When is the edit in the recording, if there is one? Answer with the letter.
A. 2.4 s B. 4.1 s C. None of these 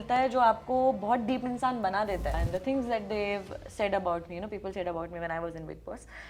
A